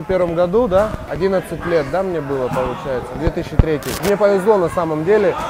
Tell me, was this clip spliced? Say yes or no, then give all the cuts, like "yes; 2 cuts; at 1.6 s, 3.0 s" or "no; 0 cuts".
yes; 2 cuts; at 1.0 s, 4.0 s